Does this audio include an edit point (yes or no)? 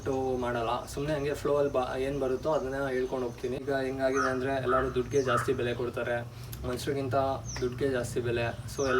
yes